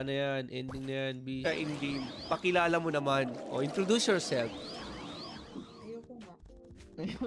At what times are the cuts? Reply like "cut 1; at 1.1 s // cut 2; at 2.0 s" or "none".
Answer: cut 1; at 1.4 s